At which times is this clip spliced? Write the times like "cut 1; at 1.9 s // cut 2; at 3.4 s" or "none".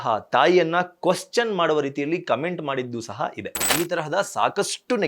cut 1; at 3.7 s